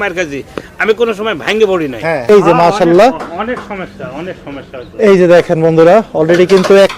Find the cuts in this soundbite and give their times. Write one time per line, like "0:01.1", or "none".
0:02.2